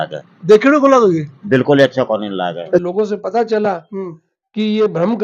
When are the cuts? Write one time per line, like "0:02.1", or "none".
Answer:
0:02.8